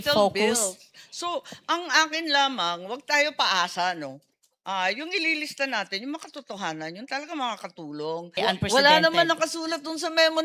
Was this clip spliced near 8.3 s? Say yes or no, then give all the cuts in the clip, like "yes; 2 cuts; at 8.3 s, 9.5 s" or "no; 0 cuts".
yes; 1 cut; at 8.3 s